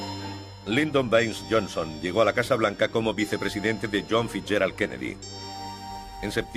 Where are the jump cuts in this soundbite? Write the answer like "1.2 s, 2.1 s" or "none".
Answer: 1.2 s